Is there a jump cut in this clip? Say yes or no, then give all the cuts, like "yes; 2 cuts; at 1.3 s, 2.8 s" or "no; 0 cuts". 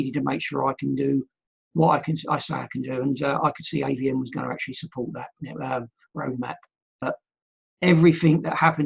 yes; 1 cut; at 7.0 s